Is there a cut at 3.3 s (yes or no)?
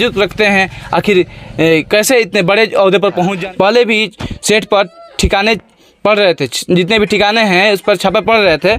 yes